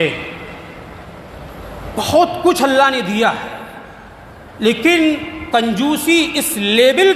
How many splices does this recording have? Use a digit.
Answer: 0